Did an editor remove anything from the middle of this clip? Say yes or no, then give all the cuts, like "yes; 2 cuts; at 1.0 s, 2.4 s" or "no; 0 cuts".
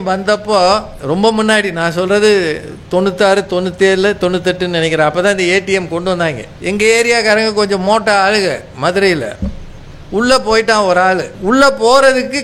yes; 3 cuts; at 0.9 s, 6.5 s, 11.3 s